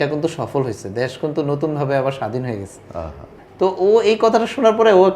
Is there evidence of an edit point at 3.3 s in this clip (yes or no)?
yes